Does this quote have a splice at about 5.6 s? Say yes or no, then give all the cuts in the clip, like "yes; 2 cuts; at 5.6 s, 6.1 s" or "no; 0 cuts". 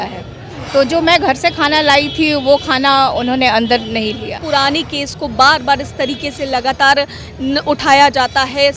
no; 1 cut; at 4.4 s